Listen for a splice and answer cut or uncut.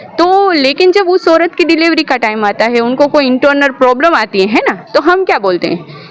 uncut